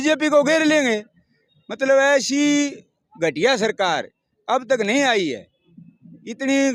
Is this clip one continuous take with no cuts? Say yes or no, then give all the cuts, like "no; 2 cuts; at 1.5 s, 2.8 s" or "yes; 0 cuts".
yes; 0 cuts